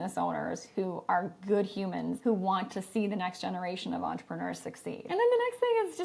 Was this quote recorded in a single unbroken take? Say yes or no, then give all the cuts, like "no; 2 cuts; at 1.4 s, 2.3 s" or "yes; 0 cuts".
no; 2 cuts; at 2.2 s, 5.0 s